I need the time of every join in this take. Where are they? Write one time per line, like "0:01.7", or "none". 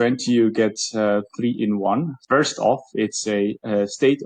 0:02.2